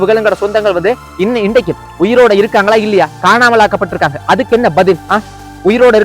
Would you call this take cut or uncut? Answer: cut